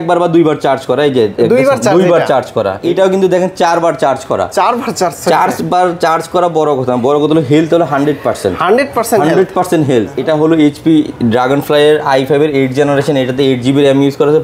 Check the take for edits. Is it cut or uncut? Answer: cut